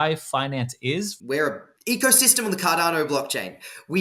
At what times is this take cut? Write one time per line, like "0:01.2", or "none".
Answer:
0:01.2

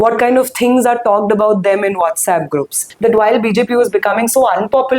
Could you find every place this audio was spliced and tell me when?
0:02.8

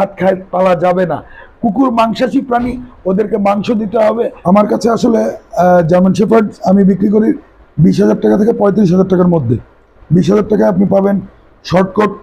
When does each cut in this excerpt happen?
0:04.4

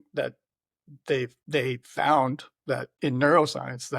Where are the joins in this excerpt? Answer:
0:01.4
0:02.9

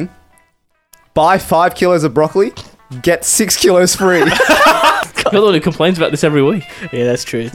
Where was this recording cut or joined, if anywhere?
0:05.0

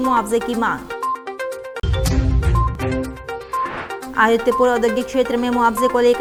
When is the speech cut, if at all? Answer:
none

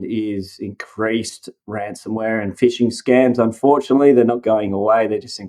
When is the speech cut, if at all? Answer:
none

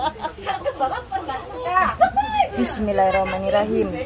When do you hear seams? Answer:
0:01.6

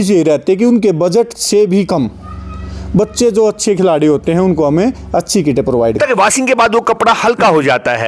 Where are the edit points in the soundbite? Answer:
0:06.0

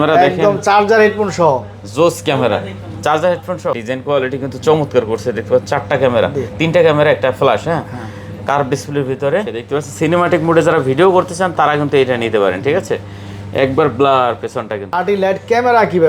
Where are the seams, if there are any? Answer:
0:03.7
0:09.6
0:14.9

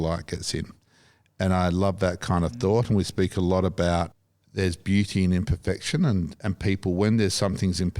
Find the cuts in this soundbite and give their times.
0:04.1

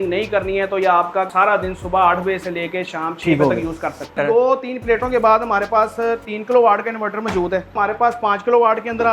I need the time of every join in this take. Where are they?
0:01.3
0:04.1
0:07.7

